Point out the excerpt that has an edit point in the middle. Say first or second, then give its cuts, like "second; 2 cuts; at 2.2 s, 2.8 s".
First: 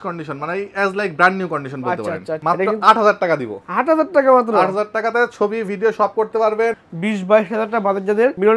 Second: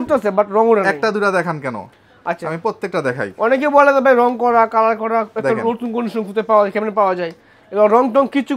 first; 2 cuts; at 2.3 s, 6.8 s